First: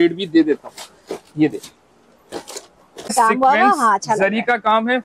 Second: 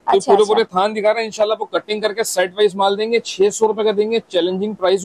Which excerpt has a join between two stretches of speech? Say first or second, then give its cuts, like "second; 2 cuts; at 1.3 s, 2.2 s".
first; 1 cut; at 3.1 s